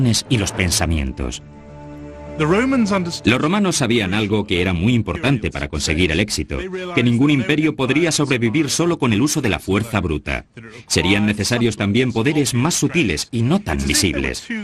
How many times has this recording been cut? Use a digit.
1